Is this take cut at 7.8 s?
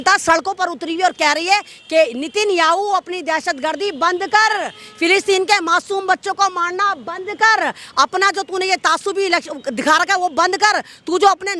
no; 0 cuts

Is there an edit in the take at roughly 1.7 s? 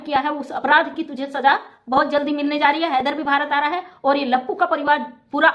no; 0 cuts

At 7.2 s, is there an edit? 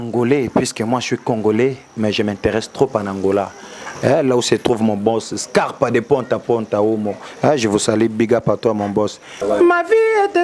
no; 1 cut; at 9.4 s

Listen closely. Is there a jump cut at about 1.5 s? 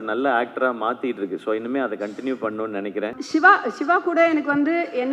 no; 1 cut; at 3.2 s

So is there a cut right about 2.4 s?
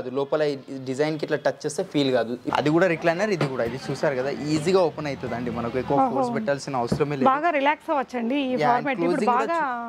yes; 1 cut; at 2.4 s

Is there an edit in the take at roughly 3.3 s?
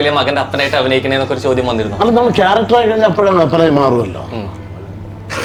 no; 0 cuts

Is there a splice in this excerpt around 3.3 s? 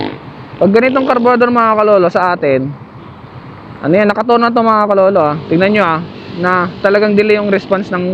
no; 0 cuts

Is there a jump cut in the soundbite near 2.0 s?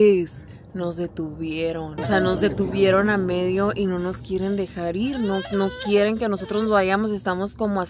yes; 1 cut; at 2.0 s

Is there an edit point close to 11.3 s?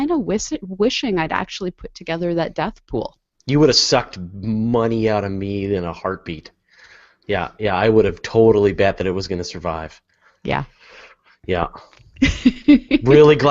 no; 0 cuts

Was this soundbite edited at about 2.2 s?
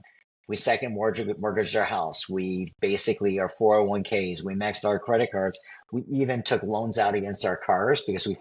no; 0 cuts

